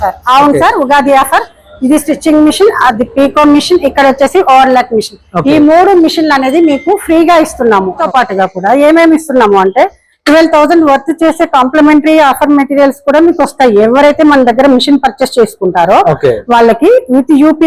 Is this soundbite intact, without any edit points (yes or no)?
no